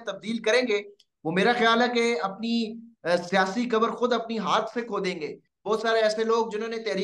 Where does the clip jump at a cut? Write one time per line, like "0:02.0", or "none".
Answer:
0:05.3